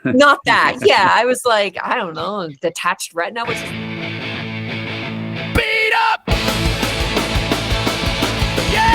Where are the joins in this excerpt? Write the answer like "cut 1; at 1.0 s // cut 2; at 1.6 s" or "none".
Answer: cut 1; at 3.4 s